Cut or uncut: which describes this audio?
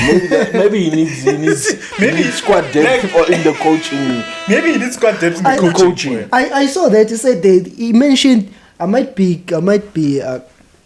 uncut